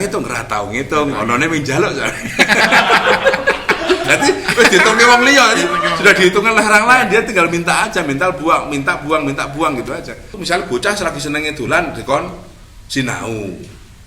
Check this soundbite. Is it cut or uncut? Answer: cut